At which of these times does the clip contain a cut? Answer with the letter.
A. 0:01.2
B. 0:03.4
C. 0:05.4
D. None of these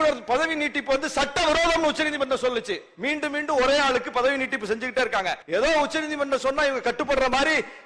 C